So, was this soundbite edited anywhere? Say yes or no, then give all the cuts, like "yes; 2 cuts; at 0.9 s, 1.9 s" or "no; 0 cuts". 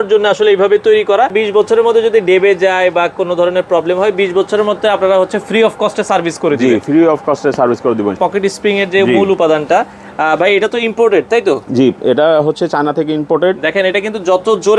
yes; 2 cuts; at 1.3 s, 8.2 s